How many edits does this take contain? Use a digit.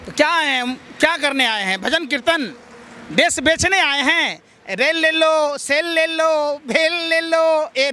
0